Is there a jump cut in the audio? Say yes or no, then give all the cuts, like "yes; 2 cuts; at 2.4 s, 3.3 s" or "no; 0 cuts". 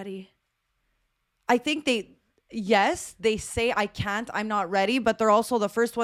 no; 0 cuts